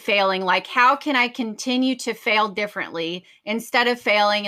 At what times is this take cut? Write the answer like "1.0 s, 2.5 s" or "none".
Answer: none